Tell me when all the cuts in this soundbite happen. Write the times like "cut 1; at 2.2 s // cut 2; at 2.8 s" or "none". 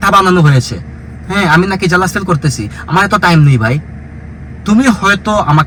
none